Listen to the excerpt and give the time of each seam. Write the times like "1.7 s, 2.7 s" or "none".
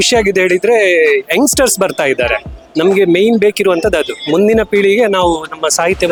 none